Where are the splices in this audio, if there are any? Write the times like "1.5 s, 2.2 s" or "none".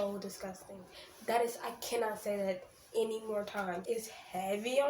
3.8 s